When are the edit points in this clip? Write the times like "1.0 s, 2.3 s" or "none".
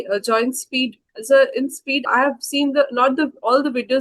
1.1 s, 2.1 s